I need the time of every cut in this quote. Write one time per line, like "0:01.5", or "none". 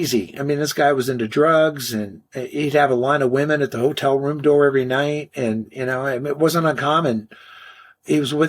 none